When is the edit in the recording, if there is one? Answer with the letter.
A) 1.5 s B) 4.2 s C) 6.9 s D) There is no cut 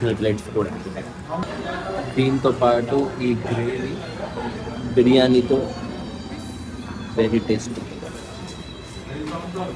A